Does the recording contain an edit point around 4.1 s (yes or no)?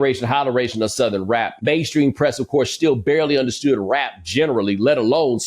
no